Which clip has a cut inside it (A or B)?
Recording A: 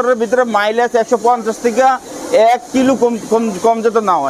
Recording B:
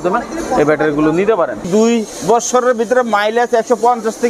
B